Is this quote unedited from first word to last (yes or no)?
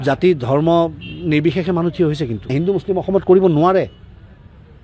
no